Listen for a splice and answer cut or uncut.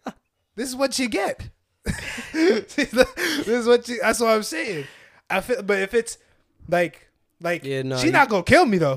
uncut